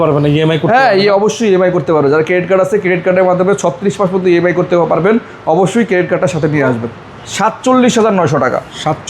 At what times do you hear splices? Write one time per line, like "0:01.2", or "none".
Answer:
0:06.9